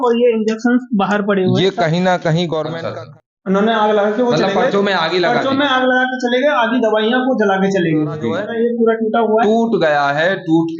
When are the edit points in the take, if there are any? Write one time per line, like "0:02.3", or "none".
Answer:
0:02.8
0:08.4